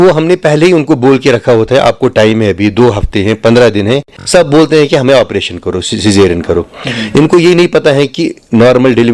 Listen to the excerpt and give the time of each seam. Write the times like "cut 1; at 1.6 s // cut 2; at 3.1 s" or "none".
cut 1; at 4.2 s